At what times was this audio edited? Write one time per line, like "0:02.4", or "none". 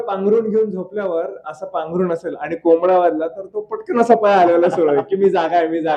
none